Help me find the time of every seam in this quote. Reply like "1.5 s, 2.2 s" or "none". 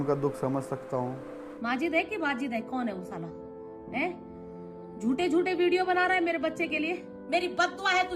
1.6 s, 7.1 s